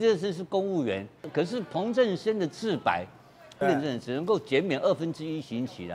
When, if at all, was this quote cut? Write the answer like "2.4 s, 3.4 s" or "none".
1.2 s, 3.5 s